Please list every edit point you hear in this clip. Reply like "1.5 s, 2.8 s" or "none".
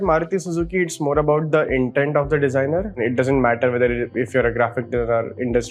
2.9 s